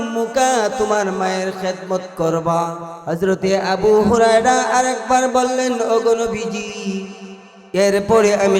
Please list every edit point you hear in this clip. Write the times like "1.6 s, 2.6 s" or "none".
2.9 s